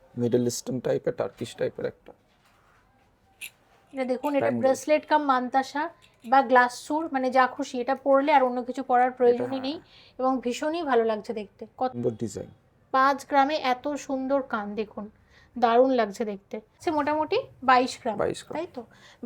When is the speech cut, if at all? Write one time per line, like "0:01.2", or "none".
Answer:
0:11.9
0:16.8